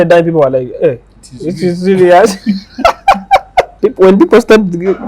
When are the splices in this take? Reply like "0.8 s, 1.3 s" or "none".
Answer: 3.7 s